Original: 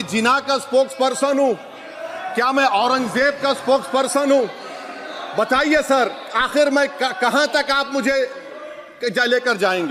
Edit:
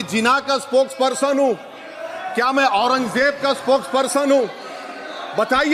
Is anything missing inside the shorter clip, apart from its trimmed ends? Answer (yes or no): no